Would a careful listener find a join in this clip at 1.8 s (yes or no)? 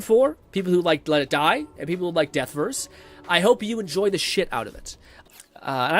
no